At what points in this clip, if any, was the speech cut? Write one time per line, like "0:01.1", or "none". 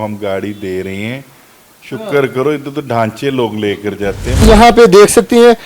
0:04.4